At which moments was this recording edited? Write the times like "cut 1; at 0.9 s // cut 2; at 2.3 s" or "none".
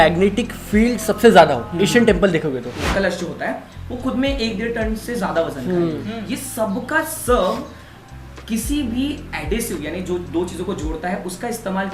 cut 1; at 2.8 s